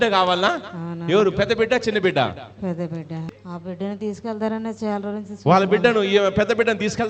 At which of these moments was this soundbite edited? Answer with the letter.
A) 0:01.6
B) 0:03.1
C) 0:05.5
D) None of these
B